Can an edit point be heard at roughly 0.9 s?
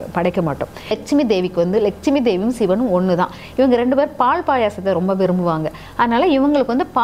yes; 1 cut; at 0.9 s

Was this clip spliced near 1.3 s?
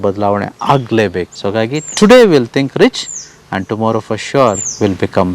yes; 1 cut; at 1.3 s

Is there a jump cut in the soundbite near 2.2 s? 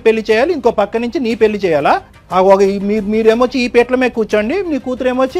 yes; 1 cut; at 2.2 s

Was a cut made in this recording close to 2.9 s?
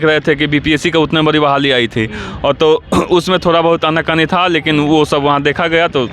no; 0 cuts

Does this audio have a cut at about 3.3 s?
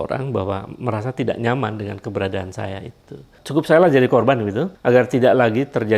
yes; 2 cuts; at 3.3 s, 4.7 s

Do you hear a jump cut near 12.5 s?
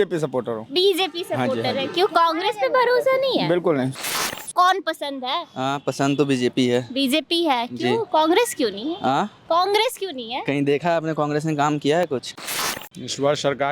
yes; 2 cuts; at 4.0 s, 12.5 s

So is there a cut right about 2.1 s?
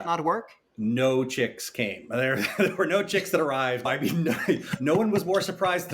no; 1 cut; at 3.9 s

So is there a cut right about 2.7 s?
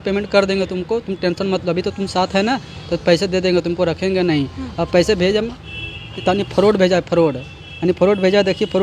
no; 0 cuts

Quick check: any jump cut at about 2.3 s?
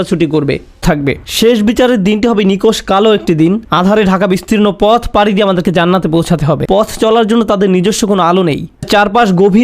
no; 2 cuts; at 0.8 s, 6.6 s

